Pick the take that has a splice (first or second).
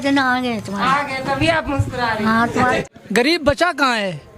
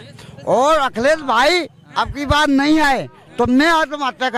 first